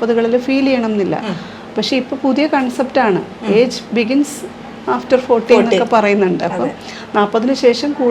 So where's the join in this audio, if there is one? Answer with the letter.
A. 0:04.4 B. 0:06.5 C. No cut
C